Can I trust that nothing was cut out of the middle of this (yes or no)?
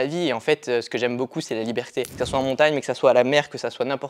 no